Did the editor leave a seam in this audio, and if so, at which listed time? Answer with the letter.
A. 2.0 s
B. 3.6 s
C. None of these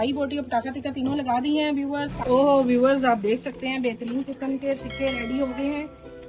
A